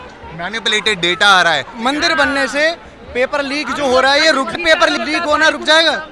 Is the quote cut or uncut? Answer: cut